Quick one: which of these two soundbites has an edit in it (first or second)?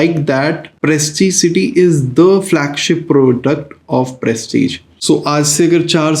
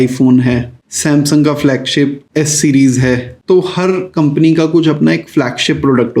first